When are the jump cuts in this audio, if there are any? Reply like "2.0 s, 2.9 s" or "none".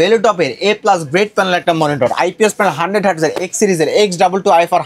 none

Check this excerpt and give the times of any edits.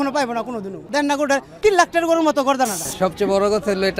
1.0 s, 2.8 s

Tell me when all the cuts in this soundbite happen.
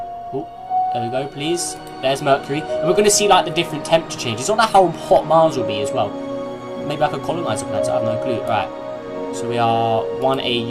5.9 s

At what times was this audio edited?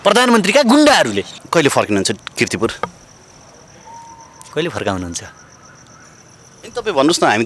1.4 s

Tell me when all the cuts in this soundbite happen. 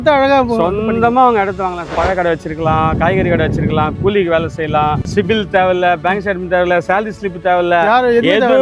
1.9 s, 5.0 s

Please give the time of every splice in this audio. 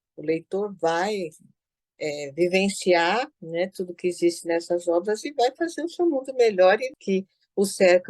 6.9 s

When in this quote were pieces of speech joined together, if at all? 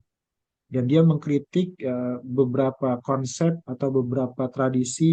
none

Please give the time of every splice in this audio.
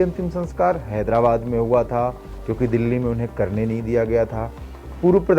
none

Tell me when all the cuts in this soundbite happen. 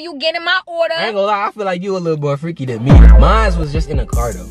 none

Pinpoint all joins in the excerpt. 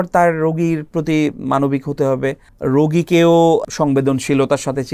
2.5 s, 3.6 s

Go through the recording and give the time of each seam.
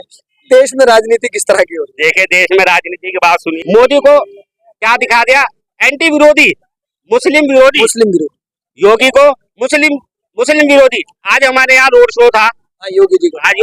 3.5 s

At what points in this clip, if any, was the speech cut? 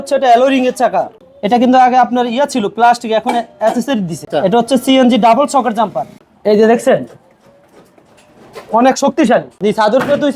1.2 s, 4.3 s, 6.1 s, 9.6 s

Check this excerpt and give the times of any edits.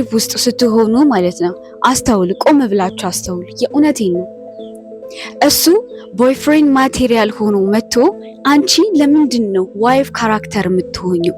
none

